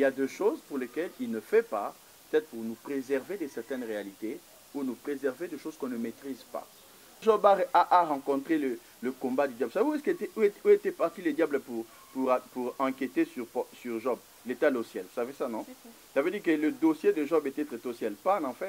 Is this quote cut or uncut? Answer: cut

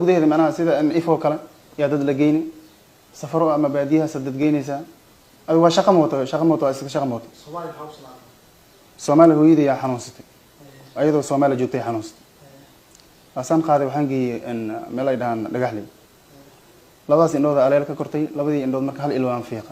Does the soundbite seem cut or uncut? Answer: uncut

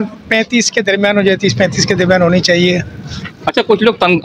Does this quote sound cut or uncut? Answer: uncut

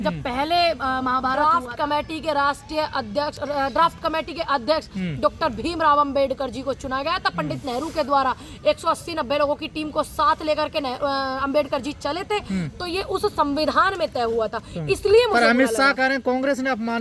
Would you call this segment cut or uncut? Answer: cut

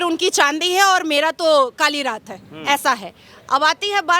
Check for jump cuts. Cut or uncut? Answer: uncut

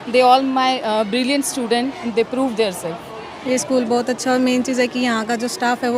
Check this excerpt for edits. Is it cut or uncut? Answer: cut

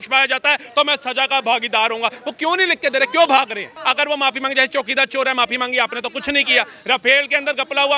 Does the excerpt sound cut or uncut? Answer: cut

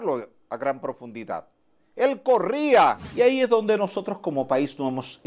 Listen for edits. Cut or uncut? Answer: cut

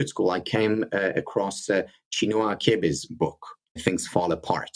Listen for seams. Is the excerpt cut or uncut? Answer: cut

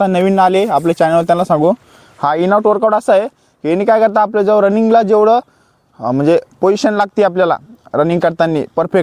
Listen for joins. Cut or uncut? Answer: uncut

